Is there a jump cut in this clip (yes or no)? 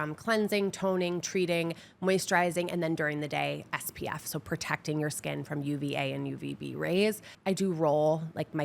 yes